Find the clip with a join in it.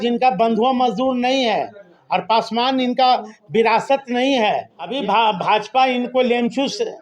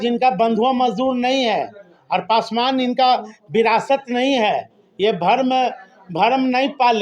first; 1 cut; at 4.8 s

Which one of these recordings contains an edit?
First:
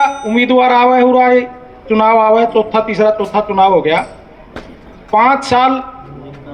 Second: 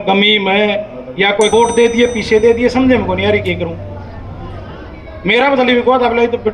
second; 1 cut; at 1.5 s

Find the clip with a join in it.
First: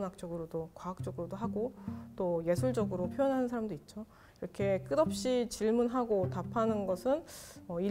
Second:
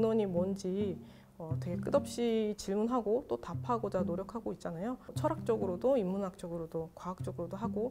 second; 1 cut; at 5.1 s

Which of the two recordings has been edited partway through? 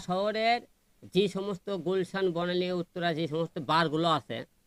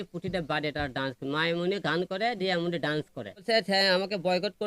second; 1 cut; at 3.3 s

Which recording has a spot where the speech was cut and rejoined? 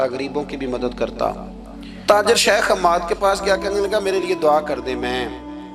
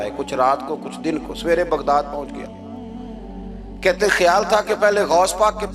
first; 1 cut; at 2.0 s

